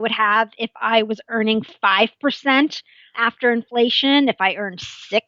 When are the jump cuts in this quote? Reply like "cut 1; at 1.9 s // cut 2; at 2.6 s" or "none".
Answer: cut 1; at 3.2 s

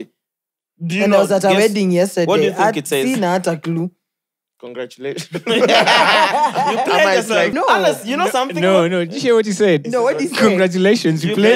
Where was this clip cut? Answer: cut 1; at 7.5 s

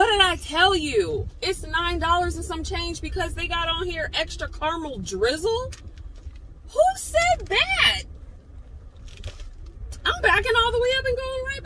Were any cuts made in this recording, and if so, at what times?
none

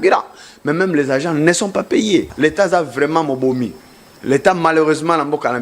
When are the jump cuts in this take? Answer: cut 1; at 2.3 s

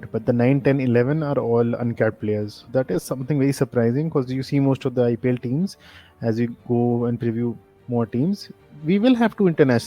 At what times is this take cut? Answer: none

